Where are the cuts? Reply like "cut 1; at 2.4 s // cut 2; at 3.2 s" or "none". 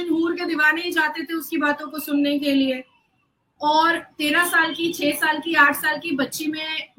none